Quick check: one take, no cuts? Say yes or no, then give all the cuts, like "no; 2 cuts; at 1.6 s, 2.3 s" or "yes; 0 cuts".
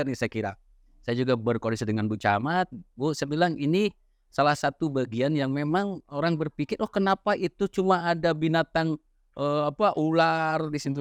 yes; 0 cuts